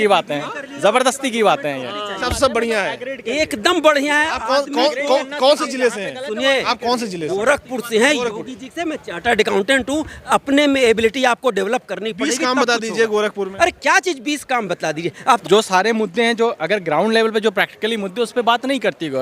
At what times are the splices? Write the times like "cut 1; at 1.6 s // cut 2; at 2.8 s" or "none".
cut 1; at 2.2 s // cut 2; at 15.4 s